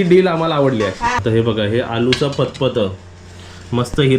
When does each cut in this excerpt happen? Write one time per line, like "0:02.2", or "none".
0:01.2

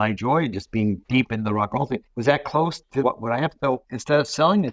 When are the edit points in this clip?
0:01.0
0:02.1
0:03.3

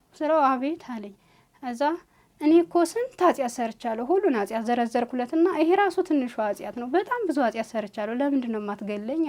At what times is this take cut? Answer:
none

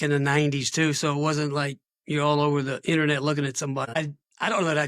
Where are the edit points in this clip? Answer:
0:03.8

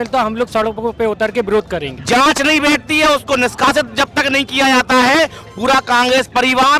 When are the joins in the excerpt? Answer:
0:01.9

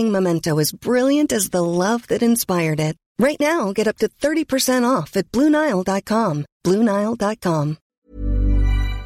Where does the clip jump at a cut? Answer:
0:07.9

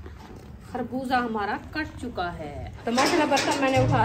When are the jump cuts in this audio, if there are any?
0:02.7

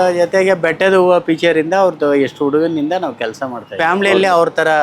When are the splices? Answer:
0:03.6

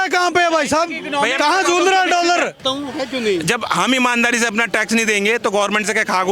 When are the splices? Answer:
0:02.6

